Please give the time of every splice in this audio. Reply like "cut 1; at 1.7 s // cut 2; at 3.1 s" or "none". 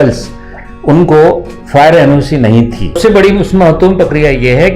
cut 1; at 3.0 s

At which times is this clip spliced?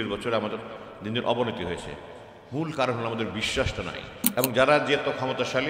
cut 1; at 4.1 s

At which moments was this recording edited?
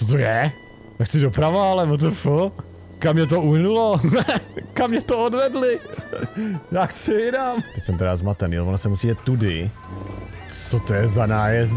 cut 1; at 7.8 s

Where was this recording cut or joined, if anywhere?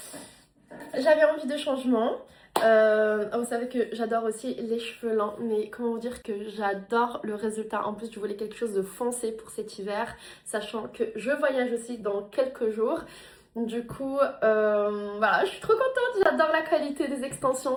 none

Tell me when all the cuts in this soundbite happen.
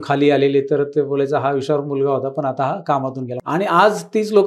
cut 1; at 3.3 s

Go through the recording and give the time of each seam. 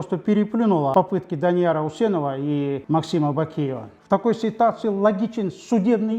cut 1; at 0.9 s // cut 2; at 2.8 s // cut 3; at 3.9 s

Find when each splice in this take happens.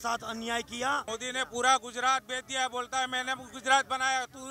cut 1; at 1.1 s

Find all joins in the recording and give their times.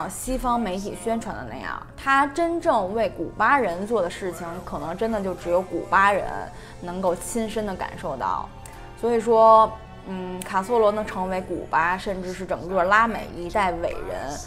none

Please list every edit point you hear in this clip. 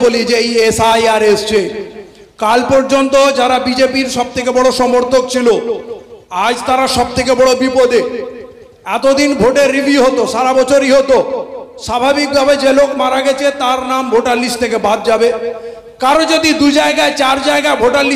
none

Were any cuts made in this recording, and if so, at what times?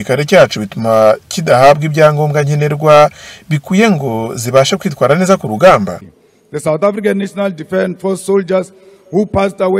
cut 1; at 6.0 s

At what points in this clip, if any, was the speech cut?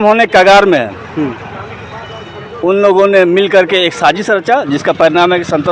none

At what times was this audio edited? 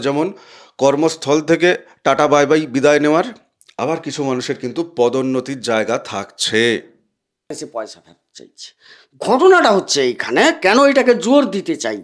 cut 1; at 7.5 s

